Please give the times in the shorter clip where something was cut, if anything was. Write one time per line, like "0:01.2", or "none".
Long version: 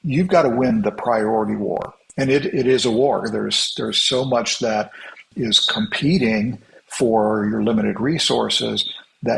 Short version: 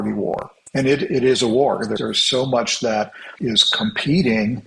0:02.0
0:03.2